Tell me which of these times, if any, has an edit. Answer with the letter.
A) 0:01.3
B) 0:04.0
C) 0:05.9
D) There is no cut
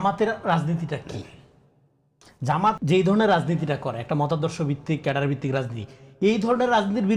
D